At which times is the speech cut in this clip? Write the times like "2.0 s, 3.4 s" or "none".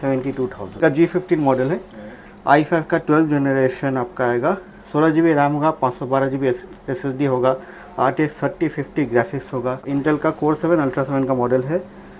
0.8 s, 9.9 s